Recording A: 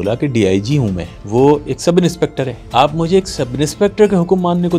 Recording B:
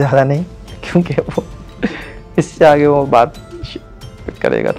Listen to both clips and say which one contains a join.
A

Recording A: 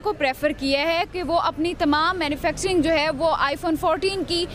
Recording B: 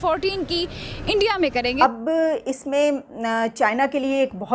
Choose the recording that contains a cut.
B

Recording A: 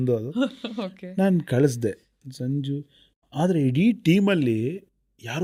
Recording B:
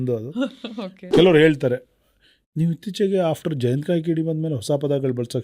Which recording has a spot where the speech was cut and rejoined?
B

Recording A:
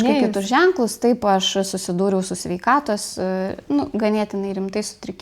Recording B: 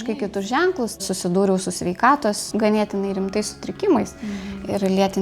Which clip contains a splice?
B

